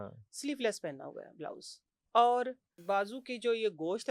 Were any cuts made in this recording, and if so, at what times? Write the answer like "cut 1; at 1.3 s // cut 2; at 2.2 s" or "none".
cut 1; at 2.8 s